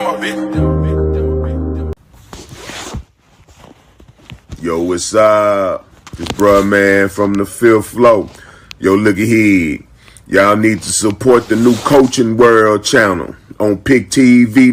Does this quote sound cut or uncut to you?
cut